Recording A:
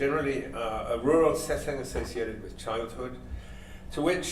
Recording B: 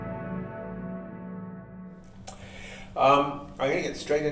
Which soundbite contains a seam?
A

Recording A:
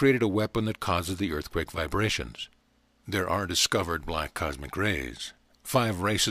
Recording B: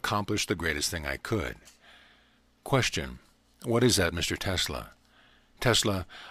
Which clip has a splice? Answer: A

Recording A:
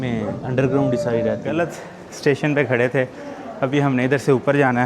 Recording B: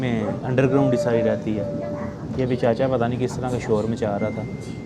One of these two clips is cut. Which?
A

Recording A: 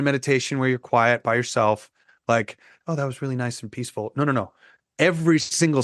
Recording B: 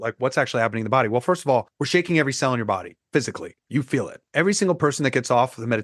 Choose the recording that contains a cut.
B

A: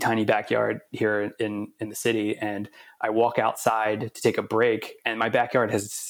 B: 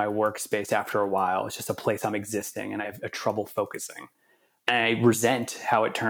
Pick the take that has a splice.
B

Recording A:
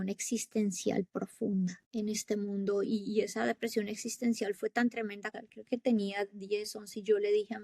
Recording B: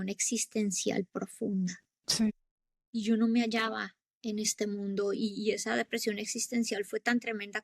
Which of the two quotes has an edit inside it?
A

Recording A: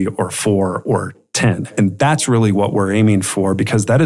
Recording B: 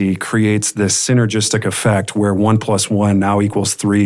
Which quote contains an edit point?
A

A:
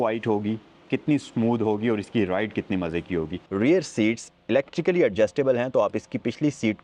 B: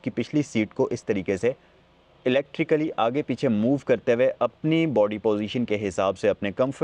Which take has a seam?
A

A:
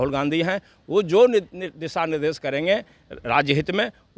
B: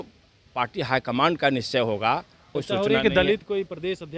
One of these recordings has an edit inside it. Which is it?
B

